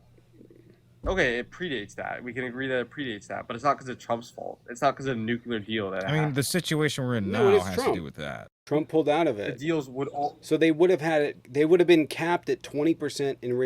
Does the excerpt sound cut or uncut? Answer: cut